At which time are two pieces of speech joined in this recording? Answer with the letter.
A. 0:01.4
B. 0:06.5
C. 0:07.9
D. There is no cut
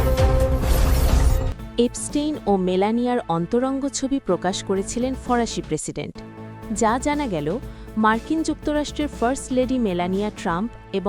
A